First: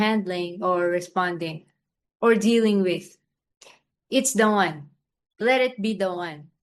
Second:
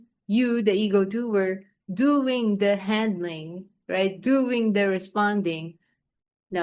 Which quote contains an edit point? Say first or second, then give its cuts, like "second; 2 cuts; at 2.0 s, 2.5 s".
first; 1 cut; at 5.4 s